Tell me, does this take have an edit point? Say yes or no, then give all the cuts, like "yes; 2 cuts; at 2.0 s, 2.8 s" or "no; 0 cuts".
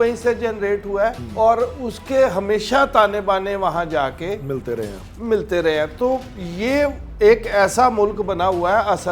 yes; 1 cut; at 1.2 s